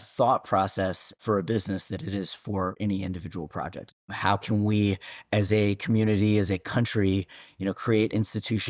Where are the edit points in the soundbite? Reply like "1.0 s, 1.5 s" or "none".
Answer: 1.2 s, 2.8 s, 4.1 s

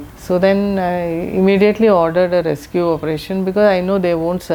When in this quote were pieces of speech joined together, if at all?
none

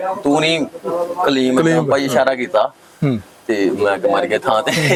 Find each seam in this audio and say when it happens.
none

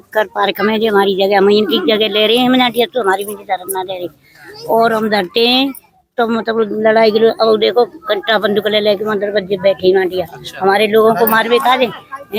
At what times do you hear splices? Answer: none

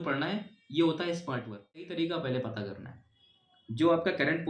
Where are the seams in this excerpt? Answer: 1.9 s

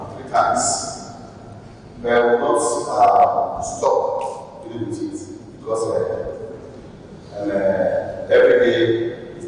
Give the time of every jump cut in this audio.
none

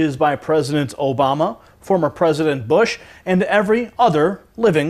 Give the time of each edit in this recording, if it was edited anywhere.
none

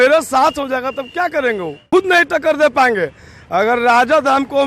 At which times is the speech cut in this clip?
1.9 s

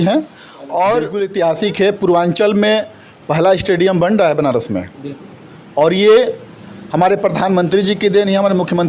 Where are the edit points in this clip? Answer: 1.1 s

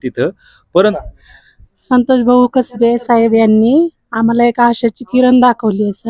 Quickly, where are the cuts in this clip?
1.0 s

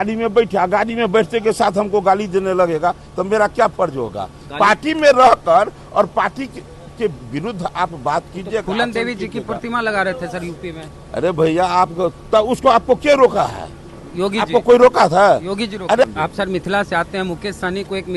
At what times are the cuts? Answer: 16.0 s

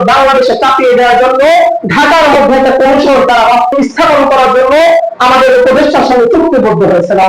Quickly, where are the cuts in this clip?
3.7 s

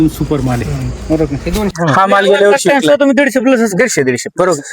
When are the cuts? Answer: 1.7 s

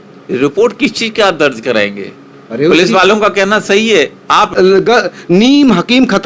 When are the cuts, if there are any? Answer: 4.5 s

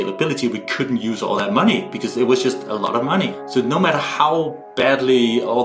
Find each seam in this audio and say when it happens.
3.4 s

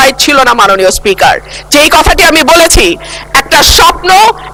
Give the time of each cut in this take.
none

